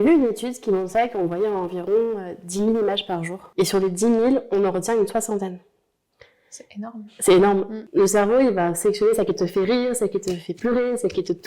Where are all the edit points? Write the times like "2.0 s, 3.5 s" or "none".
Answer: 3.4 s, 7.8 s